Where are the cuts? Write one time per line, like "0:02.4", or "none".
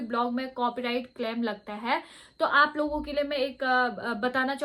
none